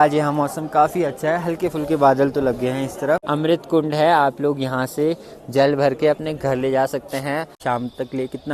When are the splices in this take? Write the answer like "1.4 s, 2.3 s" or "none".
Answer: 3.2 s, 7.5 s